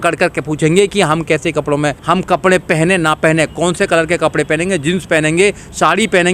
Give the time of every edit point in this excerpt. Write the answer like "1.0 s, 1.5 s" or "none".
2.0 s